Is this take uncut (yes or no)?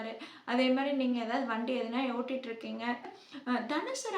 no